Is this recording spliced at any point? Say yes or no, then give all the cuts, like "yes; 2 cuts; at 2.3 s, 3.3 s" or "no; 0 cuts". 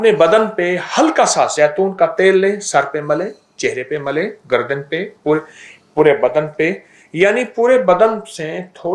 no; 0 cuts